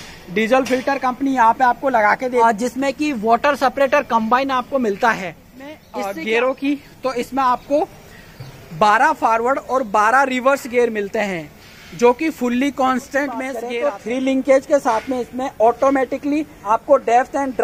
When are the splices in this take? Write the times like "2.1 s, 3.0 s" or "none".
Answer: 2.4 s, 5.9 s, 13.6 s, 16.6 s